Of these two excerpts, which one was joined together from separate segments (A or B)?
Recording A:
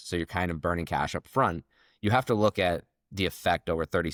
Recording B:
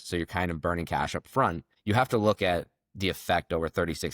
B